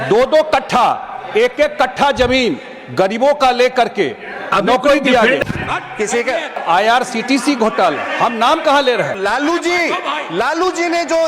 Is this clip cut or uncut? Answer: cut